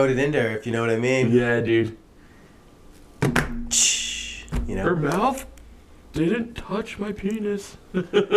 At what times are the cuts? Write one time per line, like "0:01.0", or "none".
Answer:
none